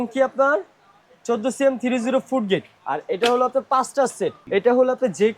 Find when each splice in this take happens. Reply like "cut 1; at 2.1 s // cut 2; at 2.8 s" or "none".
cut 1; at 2.8 s // cut 2; at 4.4 s